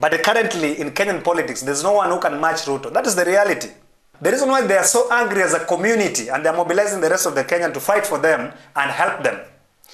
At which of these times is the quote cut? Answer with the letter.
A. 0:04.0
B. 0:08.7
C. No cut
A